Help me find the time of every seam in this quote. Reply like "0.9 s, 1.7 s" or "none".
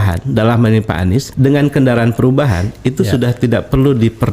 1.3 s